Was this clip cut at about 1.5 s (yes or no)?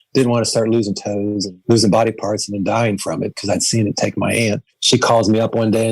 yes